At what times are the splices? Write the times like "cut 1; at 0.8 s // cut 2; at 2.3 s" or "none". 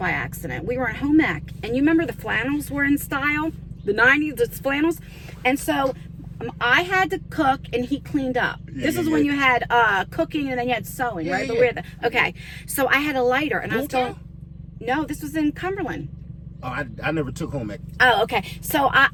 none